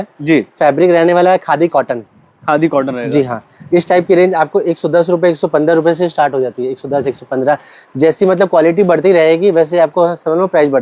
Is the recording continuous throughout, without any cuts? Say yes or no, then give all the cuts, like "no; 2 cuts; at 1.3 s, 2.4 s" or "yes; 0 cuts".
yes; 0 cuts